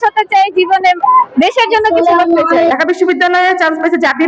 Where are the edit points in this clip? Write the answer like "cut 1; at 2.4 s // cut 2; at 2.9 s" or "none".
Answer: cut 1; at 2.7 s

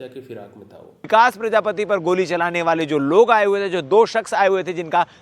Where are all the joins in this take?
cut 1; at 1.1 s

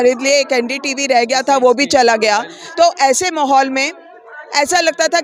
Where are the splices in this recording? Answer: none

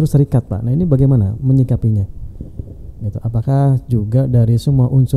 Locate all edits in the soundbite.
none

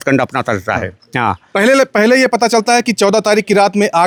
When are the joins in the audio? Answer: none

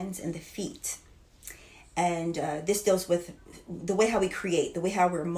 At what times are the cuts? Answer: none

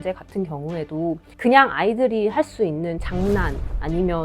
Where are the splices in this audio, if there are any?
cut 1; at 1.3 s

